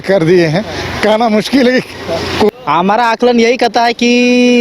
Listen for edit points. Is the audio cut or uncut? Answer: cut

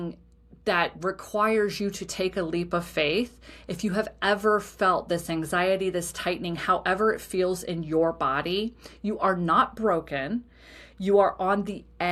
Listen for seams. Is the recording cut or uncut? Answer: uncut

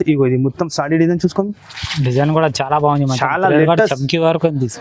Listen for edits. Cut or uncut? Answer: uncut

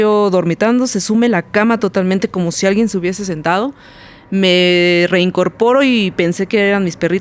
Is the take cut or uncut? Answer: uncut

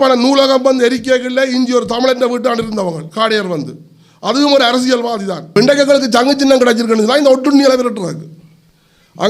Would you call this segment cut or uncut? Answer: cut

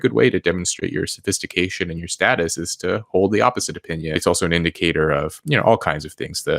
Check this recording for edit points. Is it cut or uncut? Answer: cut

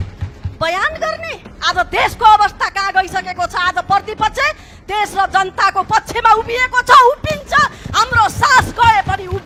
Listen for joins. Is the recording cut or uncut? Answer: uncut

